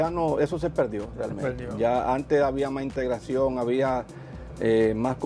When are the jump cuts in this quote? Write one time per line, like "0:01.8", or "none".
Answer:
none